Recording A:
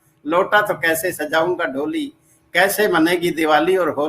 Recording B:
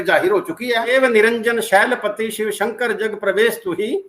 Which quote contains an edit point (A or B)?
B